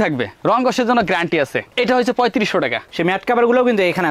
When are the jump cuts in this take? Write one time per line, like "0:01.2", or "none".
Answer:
0:02.9